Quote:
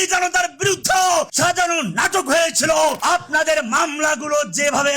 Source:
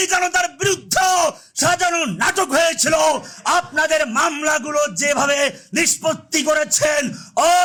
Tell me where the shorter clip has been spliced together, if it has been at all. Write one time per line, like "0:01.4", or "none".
0:01.0
0:03.0